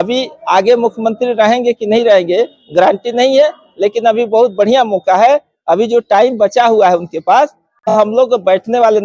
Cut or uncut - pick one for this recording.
cut